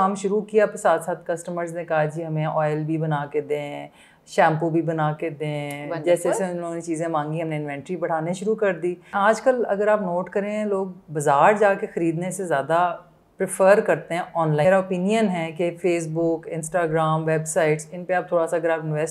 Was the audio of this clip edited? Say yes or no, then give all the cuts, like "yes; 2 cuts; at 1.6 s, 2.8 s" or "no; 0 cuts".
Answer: yes; 2 cuts; at 9.1 s, 14.6 s